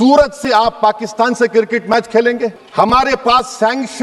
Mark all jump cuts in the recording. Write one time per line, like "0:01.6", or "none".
0:02.6